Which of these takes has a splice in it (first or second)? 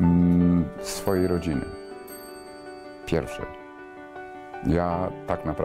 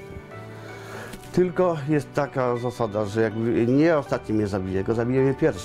first